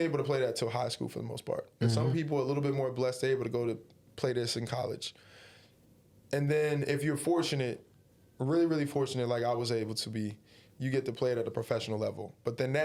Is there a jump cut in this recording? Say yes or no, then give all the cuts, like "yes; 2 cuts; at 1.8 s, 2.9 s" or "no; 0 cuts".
no; 0 cuts